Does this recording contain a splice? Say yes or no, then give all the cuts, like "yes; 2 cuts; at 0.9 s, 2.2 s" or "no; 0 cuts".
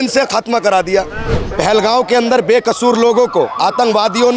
yes; 1 cut; at 1.3 s